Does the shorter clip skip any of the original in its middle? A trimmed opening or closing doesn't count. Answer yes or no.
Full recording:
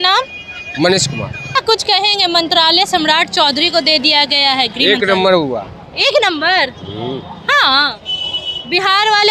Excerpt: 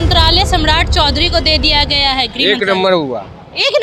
no